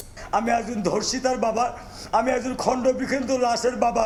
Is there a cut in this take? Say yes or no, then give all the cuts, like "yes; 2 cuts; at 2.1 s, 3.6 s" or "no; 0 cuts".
no; 0 cuts